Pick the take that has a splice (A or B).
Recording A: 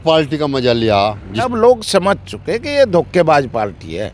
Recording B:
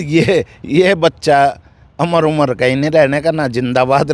A